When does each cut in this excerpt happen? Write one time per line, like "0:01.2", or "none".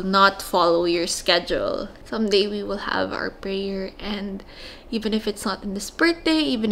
0:02.0